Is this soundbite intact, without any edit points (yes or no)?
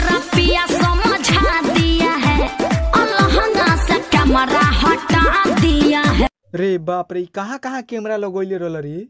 yes